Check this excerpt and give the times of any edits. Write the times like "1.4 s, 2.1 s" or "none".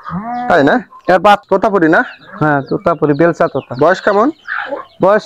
1.4 s